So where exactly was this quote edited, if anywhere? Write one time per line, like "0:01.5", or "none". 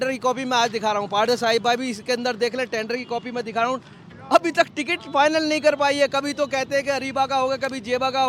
0:04.0